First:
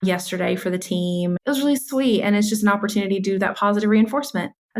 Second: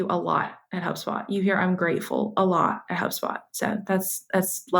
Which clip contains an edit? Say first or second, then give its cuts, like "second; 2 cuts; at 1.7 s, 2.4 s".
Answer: first; 1 cut; at 1.4 s